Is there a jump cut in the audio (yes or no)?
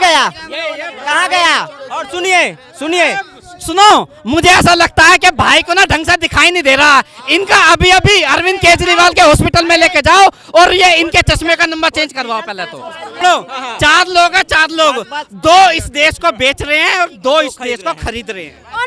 yes